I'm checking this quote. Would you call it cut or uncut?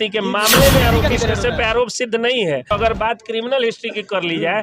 cut